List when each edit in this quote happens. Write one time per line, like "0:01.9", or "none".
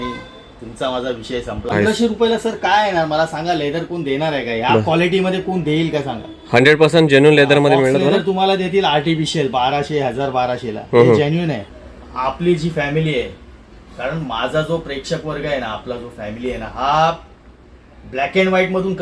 0:01.7
0:11.6